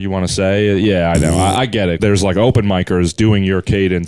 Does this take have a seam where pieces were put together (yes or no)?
yes